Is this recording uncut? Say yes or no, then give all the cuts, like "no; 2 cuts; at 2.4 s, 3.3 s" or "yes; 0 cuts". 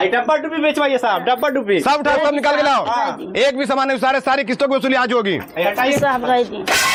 yes; 0 cuts